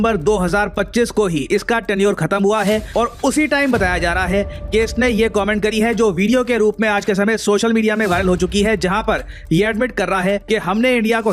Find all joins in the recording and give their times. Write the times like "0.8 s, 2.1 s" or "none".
none